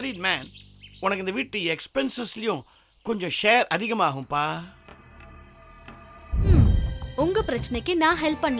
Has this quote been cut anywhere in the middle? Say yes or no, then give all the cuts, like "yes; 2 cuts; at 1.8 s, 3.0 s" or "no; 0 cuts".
yes; 1 cut; at 6.5 s